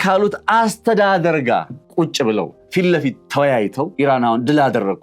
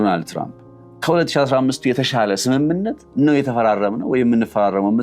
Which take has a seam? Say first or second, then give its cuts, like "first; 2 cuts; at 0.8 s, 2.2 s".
first; 3 cuts; at 1.8 s, 2.6 s, 3.9 s